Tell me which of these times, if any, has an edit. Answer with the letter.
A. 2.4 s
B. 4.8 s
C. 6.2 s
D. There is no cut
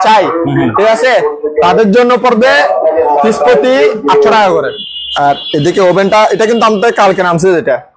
B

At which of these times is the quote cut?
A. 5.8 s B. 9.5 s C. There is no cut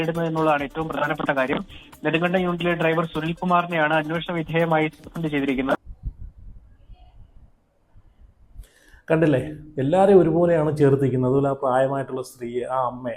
A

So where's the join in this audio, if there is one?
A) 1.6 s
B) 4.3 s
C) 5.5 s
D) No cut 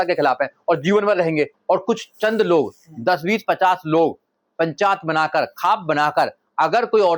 A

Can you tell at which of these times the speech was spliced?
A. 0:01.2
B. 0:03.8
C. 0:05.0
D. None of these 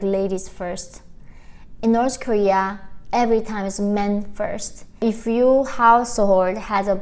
C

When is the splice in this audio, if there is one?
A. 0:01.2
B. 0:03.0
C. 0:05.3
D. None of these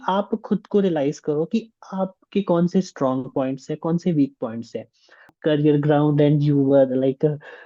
C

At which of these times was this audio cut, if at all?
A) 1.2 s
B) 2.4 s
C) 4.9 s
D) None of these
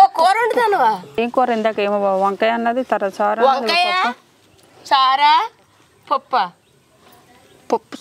A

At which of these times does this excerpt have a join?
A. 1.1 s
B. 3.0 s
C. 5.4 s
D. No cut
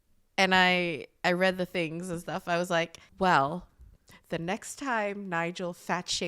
B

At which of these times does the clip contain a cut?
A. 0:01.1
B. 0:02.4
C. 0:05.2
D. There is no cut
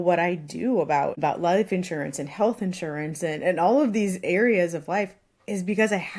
A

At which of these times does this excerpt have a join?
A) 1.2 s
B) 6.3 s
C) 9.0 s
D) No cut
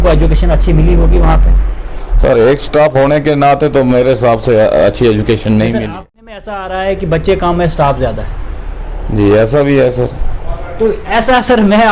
B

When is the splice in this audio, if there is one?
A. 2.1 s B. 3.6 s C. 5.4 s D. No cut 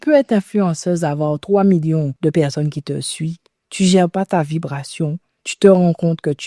A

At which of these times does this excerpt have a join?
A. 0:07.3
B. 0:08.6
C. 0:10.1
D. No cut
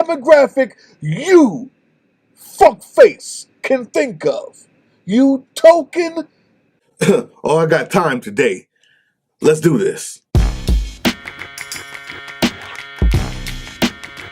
C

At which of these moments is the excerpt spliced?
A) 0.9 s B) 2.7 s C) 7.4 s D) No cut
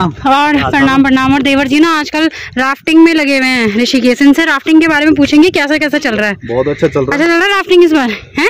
D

